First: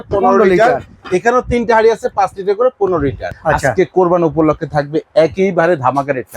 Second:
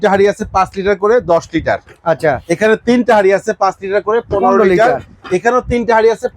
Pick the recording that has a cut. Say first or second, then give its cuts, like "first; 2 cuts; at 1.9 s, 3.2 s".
first; 1 cut; at 3.3 s